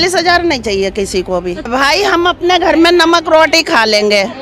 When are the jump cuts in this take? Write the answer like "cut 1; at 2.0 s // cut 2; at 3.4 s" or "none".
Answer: cut 1; at 1.7 s